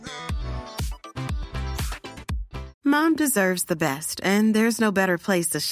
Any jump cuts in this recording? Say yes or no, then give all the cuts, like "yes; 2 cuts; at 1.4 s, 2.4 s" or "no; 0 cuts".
yes; 1 cut; at 2.7 s